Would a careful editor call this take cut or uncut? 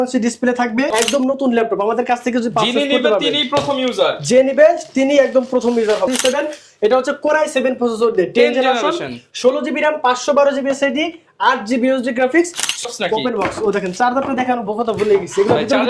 cut